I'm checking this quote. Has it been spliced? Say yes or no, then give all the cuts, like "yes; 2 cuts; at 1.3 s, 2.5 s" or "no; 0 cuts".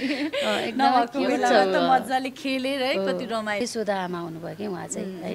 yes; 1 cut; at 3.6 s